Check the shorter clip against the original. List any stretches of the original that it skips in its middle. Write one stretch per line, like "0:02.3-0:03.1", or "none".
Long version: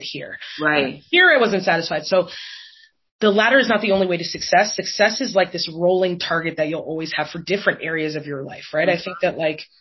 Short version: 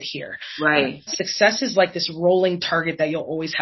0:01.1-0:04.7